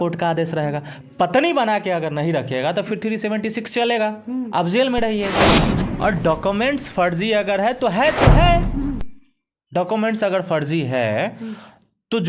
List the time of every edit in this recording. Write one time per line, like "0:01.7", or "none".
0:05.7